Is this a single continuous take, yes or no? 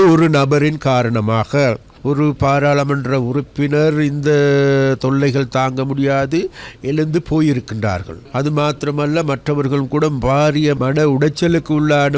no